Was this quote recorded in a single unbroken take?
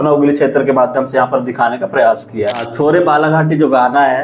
no; 1 cut; at 2.7 s

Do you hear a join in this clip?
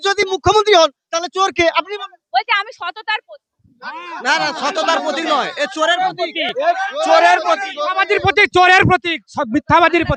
no; 0 cuts

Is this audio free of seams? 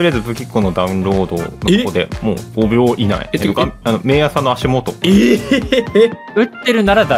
no; 5 cuts; at 1.5 s, 2.5 s, 3.3 s, 4.9 s, 6.3 s

